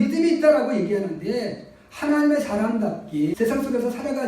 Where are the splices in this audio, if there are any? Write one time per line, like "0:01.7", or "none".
0:03.3